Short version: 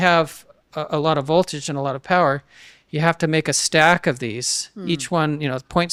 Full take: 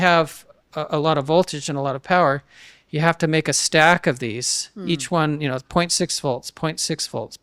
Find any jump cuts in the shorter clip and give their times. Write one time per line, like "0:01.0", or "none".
none